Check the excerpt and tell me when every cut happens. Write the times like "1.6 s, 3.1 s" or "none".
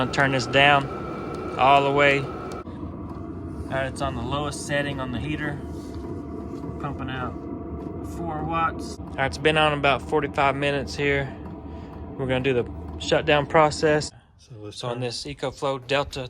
2.6 s, 9.0 s, 14.1 s